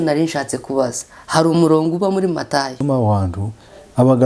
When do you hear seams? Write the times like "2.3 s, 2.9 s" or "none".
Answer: 2.8 s